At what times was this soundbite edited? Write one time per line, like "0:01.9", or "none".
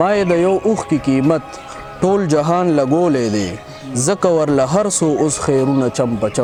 none